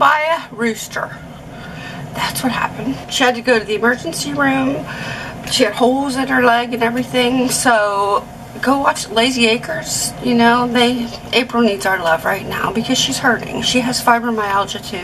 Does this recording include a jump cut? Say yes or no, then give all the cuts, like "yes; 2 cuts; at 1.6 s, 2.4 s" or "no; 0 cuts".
no; 0 cuts